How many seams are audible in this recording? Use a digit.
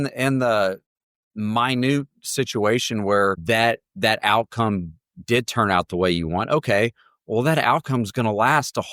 1